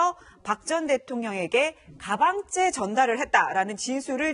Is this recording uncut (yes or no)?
no